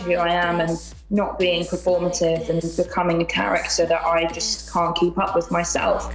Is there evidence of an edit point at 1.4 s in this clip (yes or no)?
no